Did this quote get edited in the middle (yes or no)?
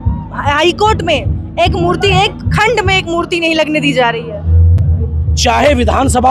no